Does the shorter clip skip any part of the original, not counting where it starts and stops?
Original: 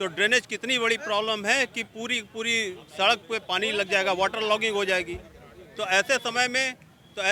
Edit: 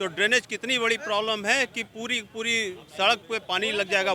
no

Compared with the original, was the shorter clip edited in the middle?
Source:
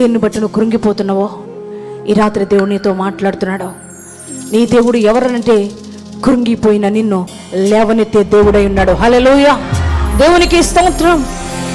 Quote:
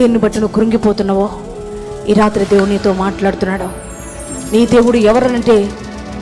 no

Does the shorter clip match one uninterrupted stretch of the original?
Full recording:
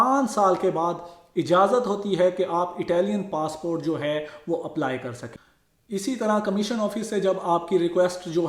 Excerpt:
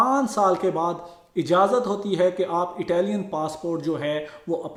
yes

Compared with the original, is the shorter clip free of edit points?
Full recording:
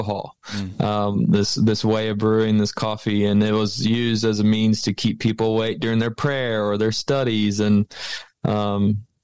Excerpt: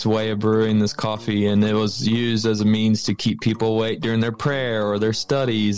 yes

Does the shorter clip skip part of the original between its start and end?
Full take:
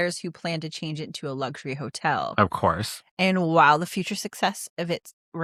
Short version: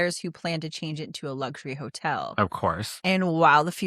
yes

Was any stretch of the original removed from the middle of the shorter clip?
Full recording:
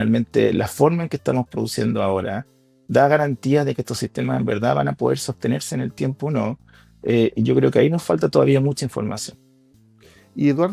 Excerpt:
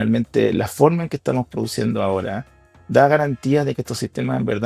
no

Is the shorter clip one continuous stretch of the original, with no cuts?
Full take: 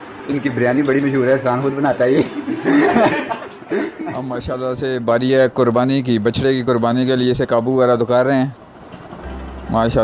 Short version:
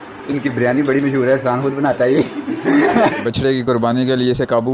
no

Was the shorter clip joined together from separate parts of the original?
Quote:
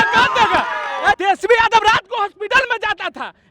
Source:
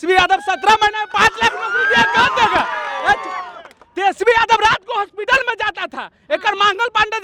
yes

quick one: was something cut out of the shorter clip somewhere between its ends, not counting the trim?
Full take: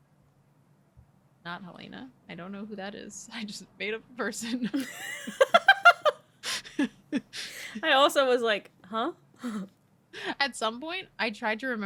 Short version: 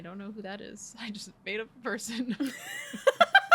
no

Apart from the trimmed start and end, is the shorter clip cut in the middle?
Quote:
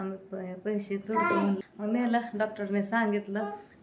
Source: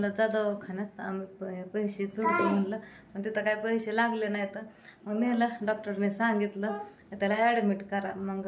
yes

